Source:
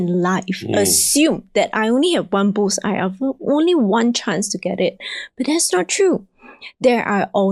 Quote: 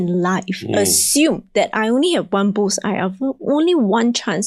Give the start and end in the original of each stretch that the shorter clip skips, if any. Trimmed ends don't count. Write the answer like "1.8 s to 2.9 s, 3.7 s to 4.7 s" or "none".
none